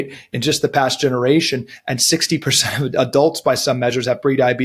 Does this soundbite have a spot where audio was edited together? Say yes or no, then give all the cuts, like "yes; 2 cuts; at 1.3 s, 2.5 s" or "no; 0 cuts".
no; 0 cuts